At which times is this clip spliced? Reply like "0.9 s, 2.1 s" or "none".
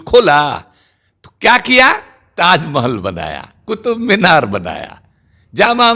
none